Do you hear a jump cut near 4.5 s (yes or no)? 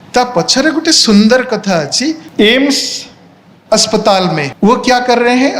yes